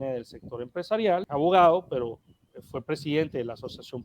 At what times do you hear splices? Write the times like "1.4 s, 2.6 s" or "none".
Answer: 1.3 s